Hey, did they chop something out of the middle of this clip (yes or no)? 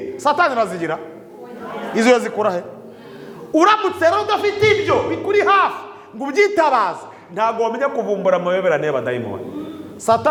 no